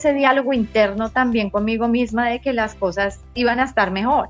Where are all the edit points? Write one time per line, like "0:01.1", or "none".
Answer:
0:03.2